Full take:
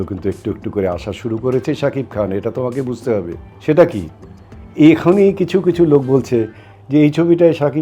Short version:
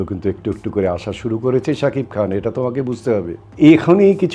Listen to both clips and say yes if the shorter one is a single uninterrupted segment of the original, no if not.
no